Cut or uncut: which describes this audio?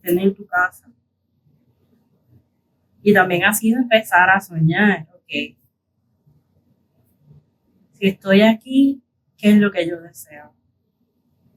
cut